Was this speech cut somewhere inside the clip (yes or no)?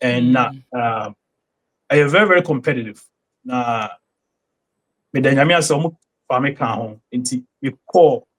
no